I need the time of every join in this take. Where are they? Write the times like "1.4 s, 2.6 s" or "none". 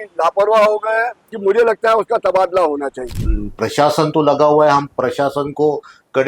1.2 s, 3.0 s